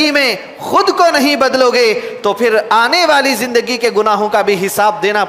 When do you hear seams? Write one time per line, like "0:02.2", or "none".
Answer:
none